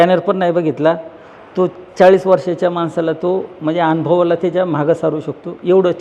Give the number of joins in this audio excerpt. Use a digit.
0